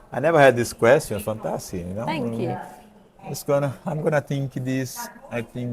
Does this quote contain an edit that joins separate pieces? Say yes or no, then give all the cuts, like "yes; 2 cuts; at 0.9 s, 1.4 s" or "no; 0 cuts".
no; 0 cuts